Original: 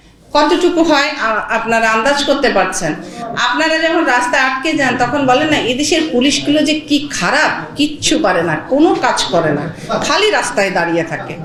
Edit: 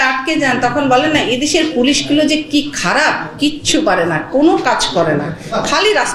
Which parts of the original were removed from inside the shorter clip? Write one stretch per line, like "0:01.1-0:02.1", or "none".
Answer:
none